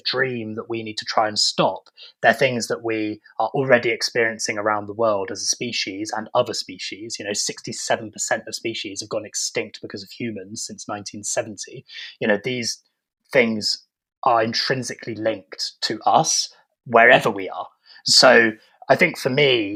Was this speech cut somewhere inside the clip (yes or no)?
no